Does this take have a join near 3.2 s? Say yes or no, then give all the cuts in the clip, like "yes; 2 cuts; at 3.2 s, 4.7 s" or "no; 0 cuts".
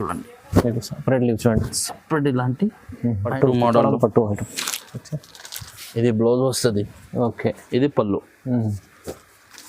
yes; 1 cut; at 3.2 s